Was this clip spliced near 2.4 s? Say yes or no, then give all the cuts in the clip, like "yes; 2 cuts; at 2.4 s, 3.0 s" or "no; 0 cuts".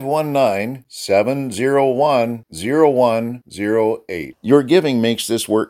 no; 0 cuts